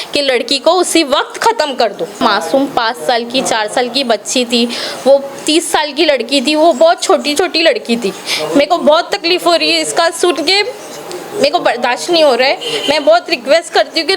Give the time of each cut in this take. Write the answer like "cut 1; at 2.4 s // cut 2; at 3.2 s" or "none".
cut 1; at 2.2 s